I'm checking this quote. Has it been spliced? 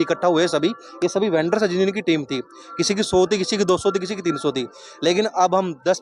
no; 0 cuts

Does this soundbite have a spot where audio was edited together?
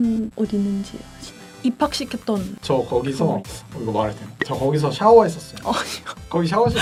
no; 0 cuts

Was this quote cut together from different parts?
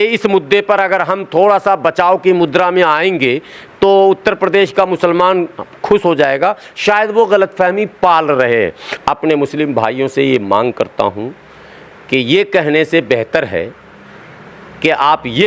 yes; 1 cut; at 8.9 s

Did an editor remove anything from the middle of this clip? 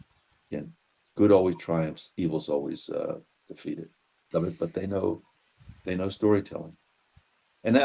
yes; 1 cut; at 4.3 s

